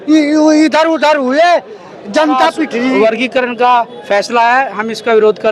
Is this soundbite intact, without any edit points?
no; 1 cut; at 2.9 s

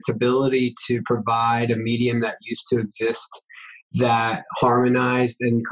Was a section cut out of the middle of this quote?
no; 0 cuts

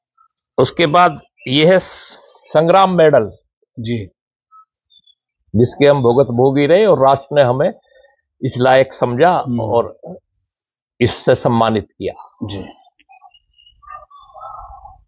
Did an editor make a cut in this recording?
no; 0 cuts

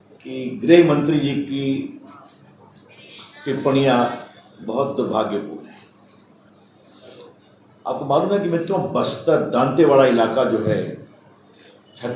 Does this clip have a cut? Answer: yes; 1 cut; at 6.5 s

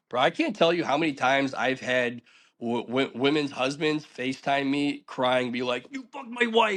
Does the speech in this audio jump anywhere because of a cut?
no; 0 cuts

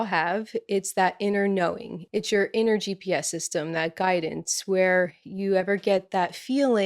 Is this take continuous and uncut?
no; 1 cut; at 1.9 s

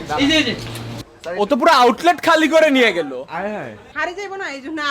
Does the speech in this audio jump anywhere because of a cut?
yes; 1 cut; at 3.9 s

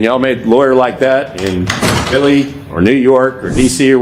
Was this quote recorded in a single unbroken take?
yes; 0 cuts

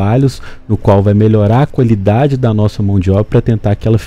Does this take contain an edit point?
no; 0 cuts

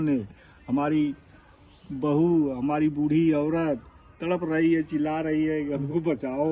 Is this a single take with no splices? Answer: yes; 0 cuts

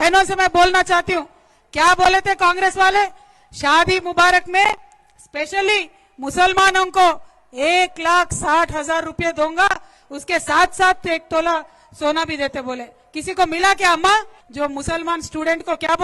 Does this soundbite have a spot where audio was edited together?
yes; 1 cut; at 14.4 s

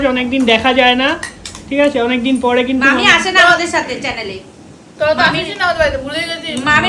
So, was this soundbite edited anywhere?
no; 0 cuts

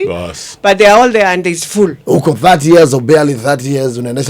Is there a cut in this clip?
yes; 1 cut; at 2.0 s

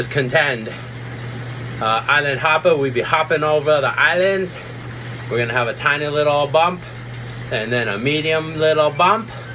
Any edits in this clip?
no; 0 cuts

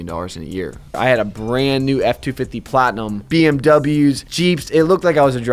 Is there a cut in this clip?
yes; 3 cuts; at 1.0 s, 3.1 s, 4.3 s

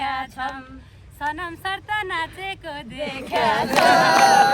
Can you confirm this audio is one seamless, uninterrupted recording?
yes; 0 cuts

